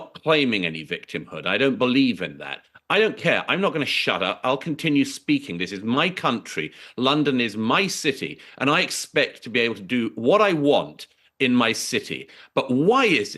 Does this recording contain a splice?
no; 0 cuts

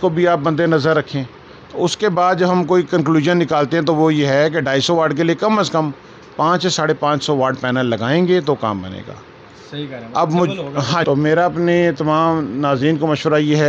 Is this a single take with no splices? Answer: no; 1 cut; at 11.0 s

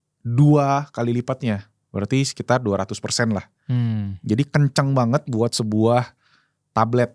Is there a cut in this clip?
no; 0 cuts

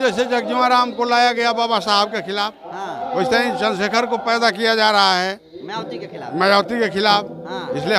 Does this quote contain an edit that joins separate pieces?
no; 0 cuts

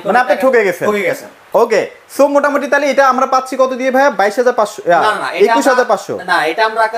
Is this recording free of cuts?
yes; 0 cuts

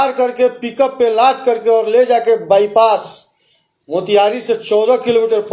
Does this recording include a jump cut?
no; 0 cuts

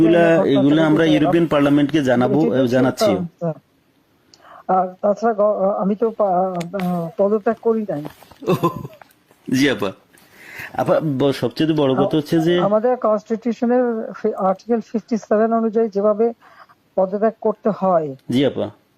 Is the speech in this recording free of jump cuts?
yes; 0 cuts

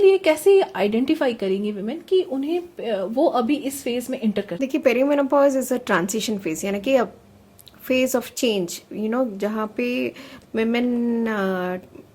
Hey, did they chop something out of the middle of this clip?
yes; 1 cut; at 4.5 s

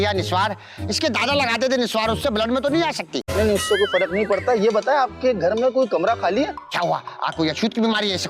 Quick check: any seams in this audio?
no; 0 cuts

